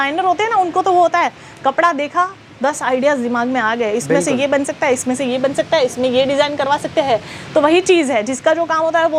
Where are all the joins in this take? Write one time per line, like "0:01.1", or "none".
none